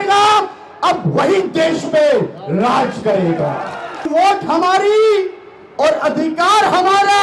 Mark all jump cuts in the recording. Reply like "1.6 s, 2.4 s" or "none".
4.1 s

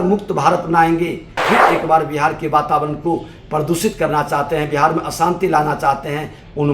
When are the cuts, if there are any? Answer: 1.4 s

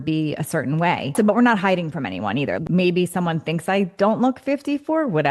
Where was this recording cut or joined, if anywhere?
1.1 s, 2.6 s

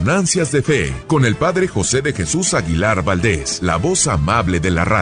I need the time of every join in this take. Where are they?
0.9 s, 3.5 s

